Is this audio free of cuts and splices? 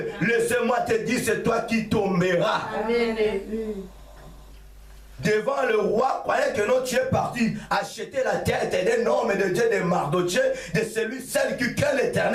yes; 0 cuts

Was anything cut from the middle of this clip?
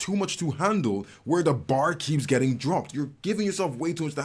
no; 0 cuts

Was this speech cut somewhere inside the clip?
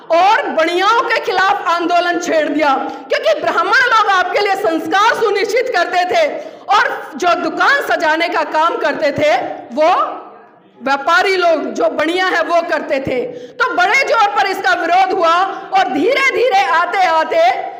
no; 0 cuts

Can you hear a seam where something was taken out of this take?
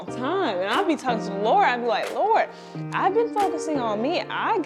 no; 0 cuts

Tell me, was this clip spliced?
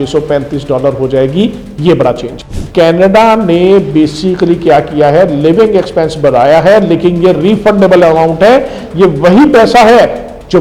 yes; 1 cut; at 2.4 s

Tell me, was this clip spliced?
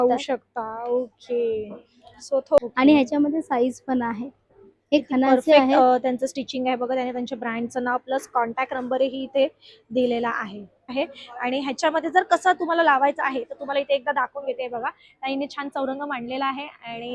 yes; 2 cuts; at 2.6 s, 10.9 s

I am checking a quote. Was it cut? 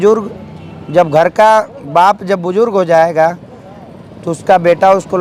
no; 0 cuts

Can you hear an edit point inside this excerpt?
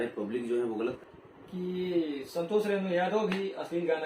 yes; 1 cut; at 1.0 s

